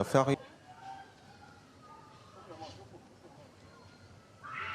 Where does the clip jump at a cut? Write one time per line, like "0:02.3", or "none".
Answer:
none